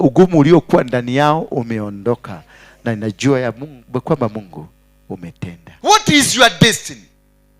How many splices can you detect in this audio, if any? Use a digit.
1